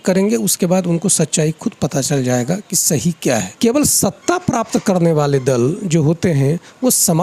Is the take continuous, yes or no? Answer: no